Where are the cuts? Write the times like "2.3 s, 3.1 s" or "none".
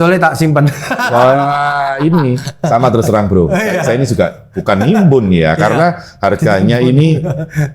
none